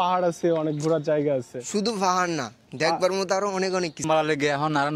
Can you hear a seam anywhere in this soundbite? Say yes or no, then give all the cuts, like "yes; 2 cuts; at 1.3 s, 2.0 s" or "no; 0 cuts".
yes; 1 cut; at 4.0 s